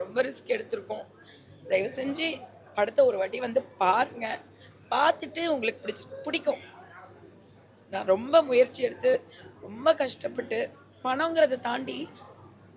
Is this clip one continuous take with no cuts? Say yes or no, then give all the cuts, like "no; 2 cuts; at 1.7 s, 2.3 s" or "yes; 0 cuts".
yes; 0 cuts